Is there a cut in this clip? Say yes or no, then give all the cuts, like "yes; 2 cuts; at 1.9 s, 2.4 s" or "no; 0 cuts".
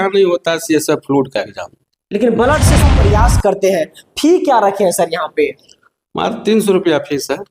yes; 1 cut; at 2.9 s